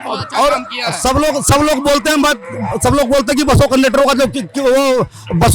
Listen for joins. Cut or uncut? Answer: uncut